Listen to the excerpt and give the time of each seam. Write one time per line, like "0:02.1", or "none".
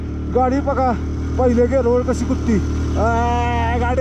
none